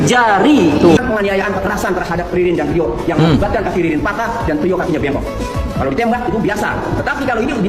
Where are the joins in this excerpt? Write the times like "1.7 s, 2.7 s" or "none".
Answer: 1.0 s